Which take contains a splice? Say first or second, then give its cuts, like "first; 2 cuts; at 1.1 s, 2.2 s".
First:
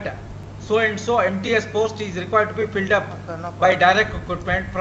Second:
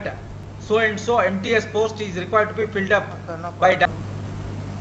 second; 1 cut; at 3.9 s